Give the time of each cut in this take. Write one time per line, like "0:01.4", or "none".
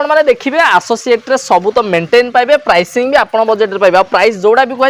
none